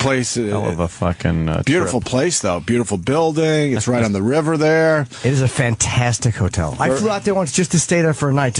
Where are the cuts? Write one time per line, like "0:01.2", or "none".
none